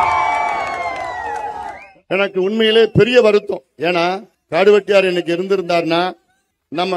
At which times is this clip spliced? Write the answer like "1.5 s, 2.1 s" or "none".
2.0 s